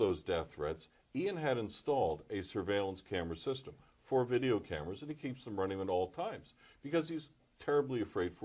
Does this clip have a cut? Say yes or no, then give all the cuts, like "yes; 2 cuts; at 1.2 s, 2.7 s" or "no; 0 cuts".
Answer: no; 0 cuts